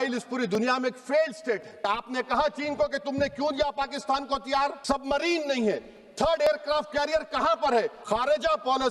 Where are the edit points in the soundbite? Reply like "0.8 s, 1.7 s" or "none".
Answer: 1.9 s, 4.8 s, 8.0 s